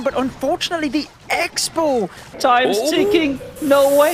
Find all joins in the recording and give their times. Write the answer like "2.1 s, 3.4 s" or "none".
2.3 s

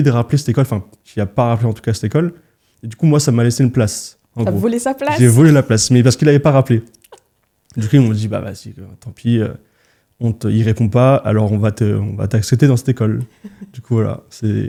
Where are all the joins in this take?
none

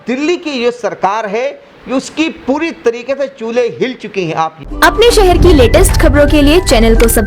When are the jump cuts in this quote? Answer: 4.6 s

